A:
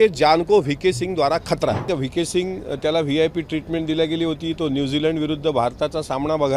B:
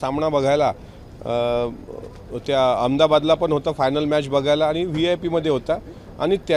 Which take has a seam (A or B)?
A